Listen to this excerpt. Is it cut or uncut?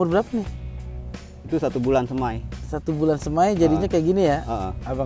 uncut